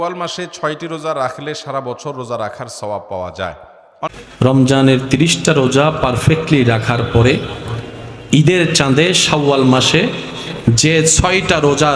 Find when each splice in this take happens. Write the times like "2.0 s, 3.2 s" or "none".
4.1 s

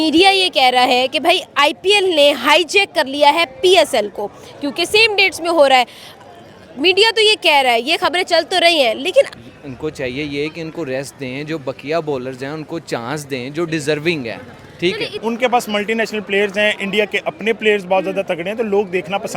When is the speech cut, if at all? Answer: 9.3 s, 15.2 s

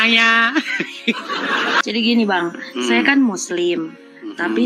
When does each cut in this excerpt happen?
1.8 s

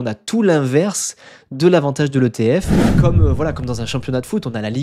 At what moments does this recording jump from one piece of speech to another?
3.0 s

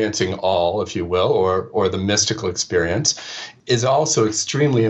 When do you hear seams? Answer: none

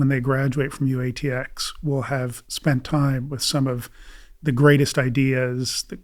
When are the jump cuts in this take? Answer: none

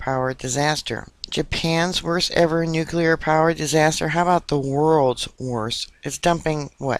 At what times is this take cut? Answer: 1.3 s

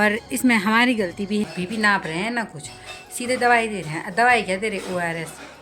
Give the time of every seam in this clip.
1.4 s

